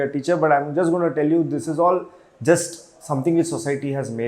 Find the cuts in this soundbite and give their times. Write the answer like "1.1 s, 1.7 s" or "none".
none